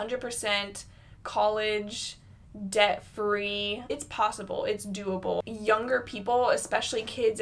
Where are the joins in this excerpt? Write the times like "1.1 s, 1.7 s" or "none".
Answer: 4.0 s, 5.4 s